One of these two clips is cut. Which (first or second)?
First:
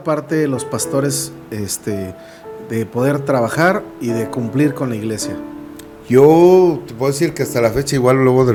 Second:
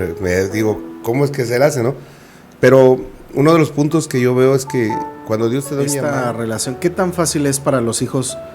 second